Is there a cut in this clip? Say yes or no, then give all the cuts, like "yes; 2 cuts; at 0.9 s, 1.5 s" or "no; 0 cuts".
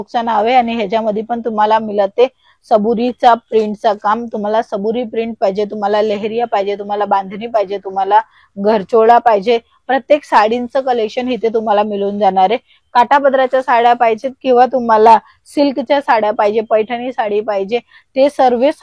no; 0 cuts